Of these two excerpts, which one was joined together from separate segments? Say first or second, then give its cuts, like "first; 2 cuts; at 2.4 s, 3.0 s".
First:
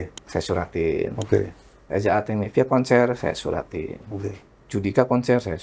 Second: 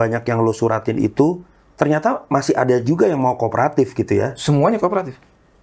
first; 1 cut; at 4.5 s